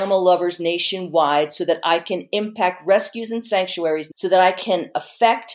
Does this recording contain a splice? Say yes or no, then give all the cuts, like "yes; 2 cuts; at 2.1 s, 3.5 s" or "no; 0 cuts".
yes; 2 cuts; at 4.1 s, 4.7 s